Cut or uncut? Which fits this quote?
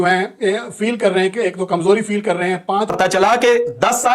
cut